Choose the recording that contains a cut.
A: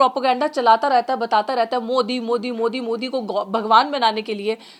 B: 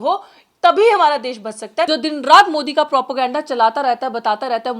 B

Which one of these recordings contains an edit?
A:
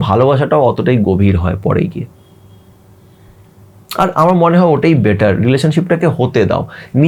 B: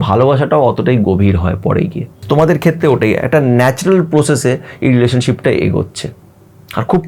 B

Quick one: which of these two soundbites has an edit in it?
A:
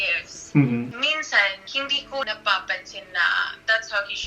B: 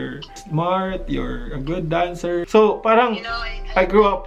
A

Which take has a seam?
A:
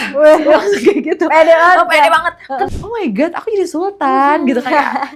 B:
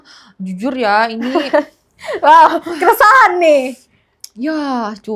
A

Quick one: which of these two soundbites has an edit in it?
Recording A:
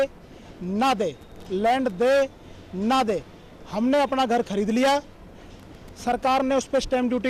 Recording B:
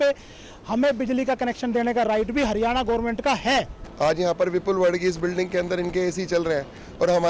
B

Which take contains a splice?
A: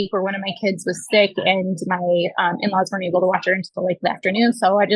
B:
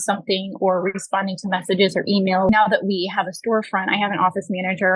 B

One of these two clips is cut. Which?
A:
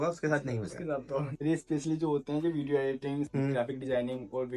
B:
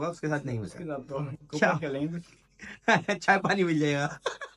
A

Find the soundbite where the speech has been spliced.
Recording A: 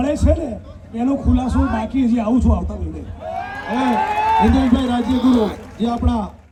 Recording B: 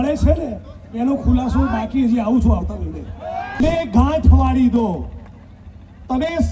B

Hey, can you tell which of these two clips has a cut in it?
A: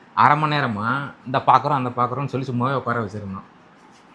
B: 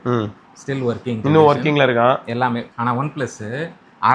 B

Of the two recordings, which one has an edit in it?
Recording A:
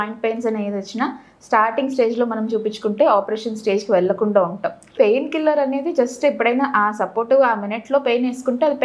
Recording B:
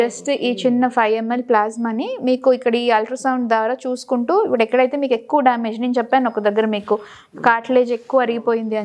A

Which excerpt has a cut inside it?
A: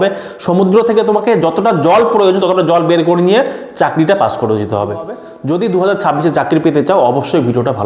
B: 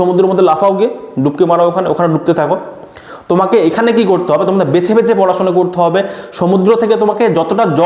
A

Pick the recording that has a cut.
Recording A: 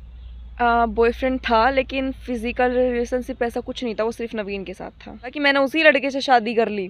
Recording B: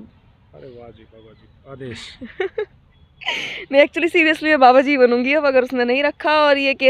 A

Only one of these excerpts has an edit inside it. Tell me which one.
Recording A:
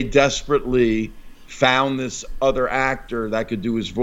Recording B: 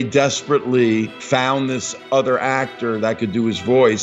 B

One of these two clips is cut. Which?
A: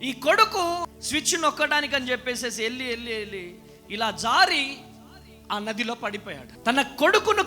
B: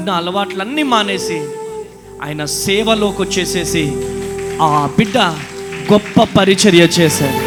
A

